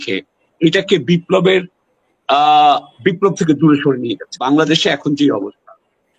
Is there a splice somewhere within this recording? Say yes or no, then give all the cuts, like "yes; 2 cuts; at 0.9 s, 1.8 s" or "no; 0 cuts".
yes; 1 cut; at 4.3 s